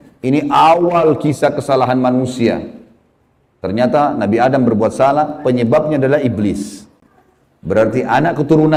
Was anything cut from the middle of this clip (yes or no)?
no